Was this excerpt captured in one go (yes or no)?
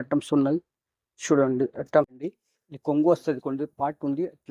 no